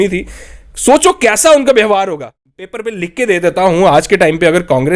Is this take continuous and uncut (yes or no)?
no